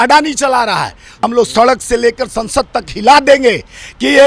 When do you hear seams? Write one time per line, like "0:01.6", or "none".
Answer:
0:01.2